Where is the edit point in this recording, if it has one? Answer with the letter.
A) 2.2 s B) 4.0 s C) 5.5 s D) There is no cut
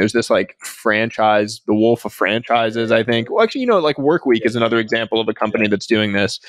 D